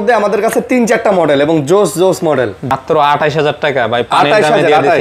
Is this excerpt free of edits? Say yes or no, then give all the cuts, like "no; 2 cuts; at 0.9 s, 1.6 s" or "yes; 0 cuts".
no; 1 cut; at 2.7 s